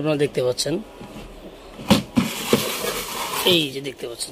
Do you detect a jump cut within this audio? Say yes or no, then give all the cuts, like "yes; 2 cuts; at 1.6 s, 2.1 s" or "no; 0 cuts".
no; 0 cuts